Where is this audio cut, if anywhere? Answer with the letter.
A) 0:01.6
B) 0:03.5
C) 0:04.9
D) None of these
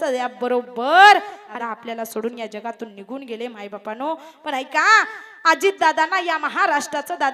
A